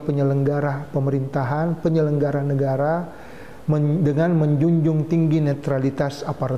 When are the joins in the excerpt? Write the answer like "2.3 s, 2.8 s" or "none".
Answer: none